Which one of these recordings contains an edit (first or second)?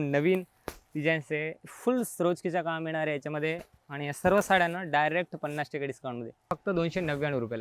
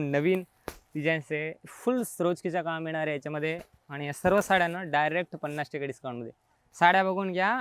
first